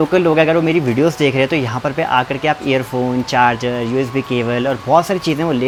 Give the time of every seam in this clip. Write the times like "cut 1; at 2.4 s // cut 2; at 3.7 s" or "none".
none